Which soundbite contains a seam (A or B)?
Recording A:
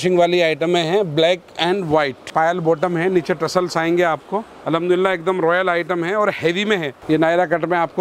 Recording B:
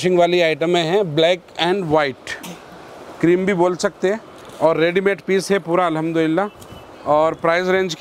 A